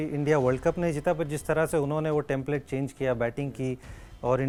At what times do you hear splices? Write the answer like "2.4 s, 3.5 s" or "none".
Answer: none